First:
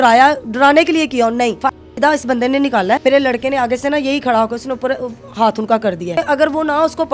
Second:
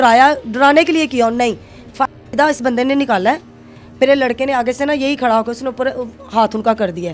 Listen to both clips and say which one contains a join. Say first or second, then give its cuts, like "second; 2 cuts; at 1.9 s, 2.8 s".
first; 3 cuts; at 1.6 s, 3.0 s, 6.2 s